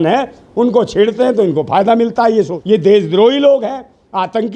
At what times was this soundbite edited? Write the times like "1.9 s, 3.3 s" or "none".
2.6 s